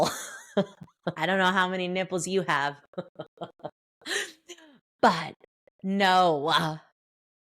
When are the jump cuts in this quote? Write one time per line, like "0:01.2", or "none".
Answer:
0:01.2